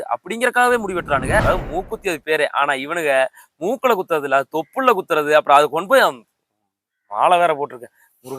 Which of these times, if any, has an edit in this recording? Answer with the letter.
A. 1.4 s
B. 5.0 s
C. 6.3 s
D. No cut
A